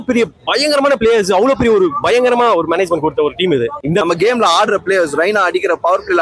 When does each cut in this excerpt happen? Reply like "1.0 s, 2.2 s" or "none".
4.0 s